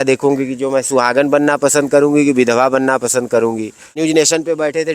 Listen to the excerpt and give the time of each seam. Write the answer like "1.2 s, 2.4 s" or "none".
4.0 s